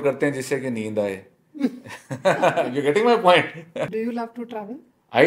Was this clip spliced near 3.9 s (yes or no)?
yes